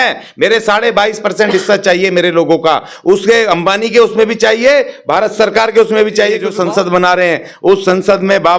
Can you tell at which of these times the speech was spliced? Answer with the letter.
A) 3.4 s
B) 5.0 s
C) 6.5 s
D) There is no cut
C